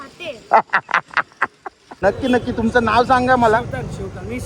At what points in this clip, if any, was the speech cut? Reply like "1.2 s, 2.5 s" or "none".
1.9 s

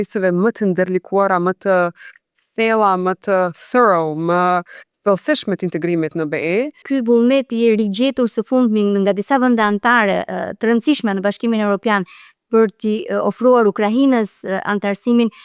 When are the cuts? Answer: 6.8 s

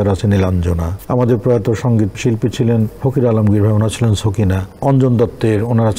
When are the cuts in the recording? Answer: 0.9 s, 2.1 s, 3.0 s, 4.7 s

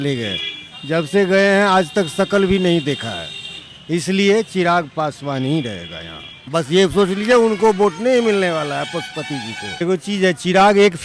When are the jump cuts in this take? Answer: 6.4 s, 9.8 s

